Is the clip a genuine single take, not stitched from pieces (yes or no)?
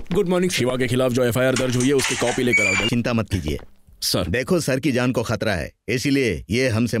no